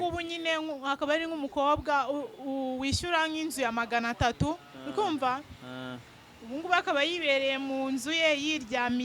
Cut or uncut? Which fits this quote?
uncut